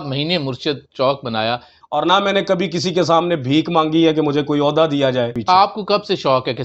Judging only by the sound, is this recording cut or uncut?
cut